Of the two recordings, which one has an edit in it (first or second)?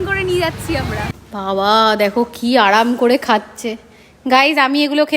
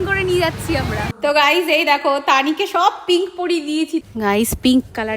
second